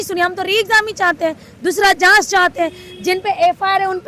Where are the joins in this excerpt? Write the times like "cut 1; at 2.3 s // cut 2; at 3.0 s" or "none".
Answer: none